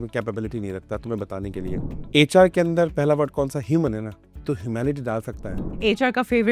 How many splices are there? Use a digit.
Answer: 1